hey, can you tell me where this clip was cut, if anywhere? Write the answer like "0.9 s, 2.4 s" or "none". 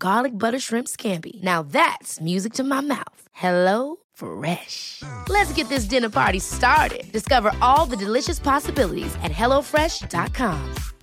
none